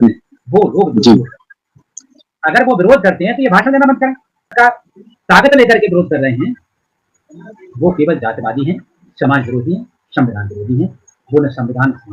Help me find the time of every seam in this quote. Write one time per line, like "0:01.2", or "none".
0:04.4